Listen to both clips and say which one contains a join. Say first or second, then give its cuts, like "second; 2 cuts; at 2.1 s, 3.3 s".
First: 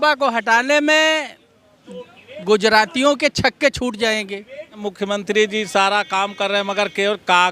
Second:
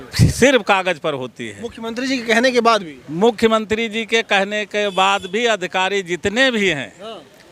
first; 1 cut; at 4.9 s